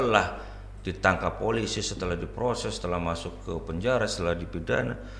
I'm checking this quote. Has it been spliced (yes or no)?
no